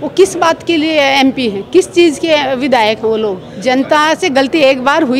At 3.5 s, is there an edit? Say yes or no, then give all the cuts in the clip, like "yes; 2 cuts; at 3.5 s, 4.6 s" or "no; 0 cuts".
yes; 1 cut; at 3.5 s